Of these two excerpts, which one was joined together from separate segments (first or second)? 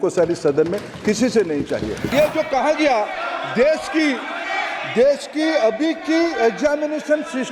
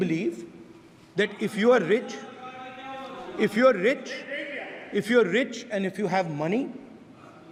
first